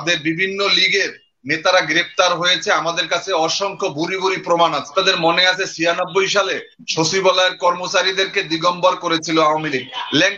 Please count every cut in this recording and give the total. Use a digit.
1